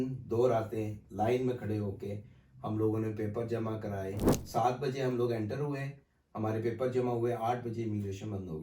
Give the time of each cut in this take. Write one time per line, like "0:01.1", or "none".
0:04.4